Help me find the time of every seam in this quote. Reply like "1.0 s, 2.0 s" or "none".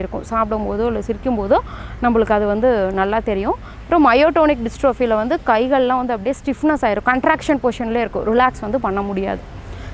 none

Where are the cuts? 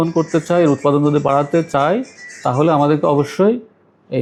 none

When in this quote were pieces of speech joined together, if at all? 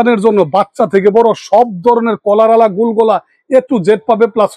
none

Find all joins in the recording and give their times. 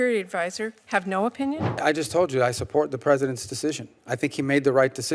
1.8 s

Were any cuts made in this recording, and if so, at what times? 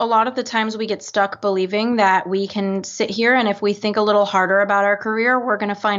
none

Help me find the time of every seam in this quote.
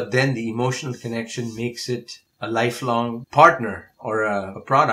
3.2 s

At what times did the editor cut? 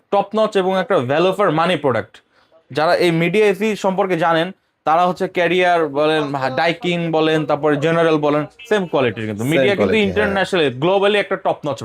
none

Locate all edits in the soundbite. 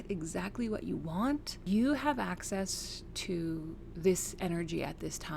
1.6 s

